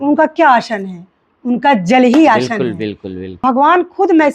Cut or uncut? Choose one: cut